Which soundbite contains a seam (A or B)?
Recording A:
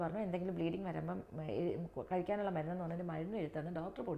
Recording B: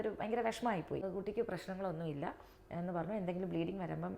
B